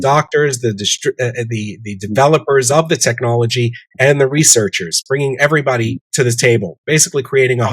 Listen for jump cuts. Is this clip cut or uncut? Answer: cut